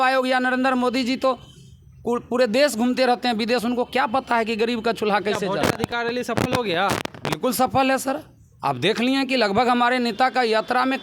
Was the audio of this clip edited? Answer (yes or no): no